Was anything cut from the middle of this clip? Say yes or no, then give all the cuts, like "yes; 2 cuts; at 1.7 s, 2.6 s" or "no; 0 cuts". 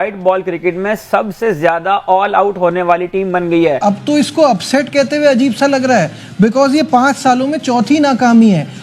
yes; 1 cut; at 3.8 s